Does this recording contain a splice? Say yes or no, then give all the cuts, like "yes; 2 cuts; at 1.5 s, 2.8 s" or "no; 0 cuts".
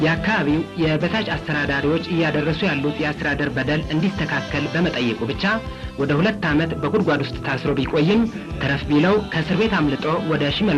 no; 0 cuts